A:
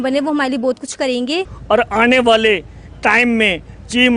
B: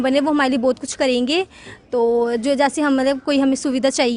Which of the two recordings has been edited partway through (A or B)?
A